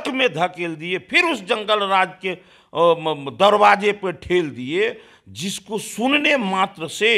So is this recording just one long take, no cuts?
yes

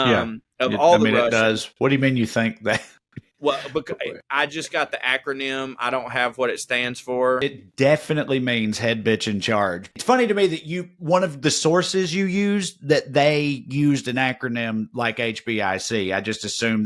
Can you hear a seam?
yes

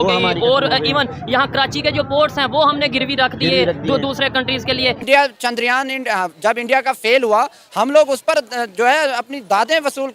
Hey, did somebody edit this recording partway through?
yes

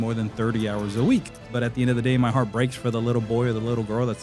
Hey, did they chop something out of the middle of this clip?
yes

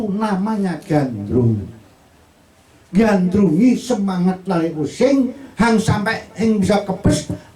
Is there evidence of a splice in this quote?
no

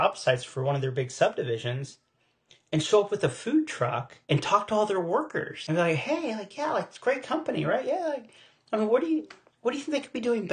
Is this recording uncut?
no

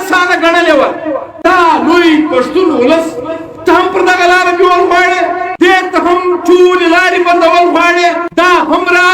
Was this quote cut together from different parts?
yes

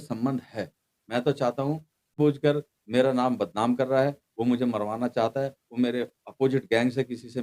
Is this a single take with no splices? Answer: no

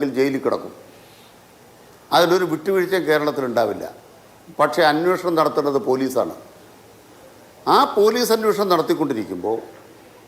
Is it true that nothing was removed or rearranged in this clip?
yes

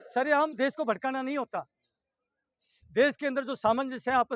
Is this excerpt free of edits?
yes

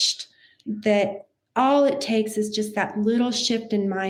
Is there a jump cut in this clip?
no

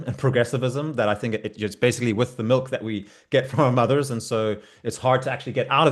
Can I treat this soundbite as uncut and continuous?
yes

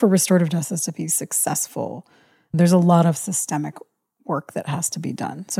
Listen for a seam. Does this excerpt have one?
no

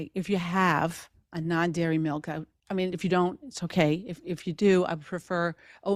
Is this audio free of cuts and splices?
yes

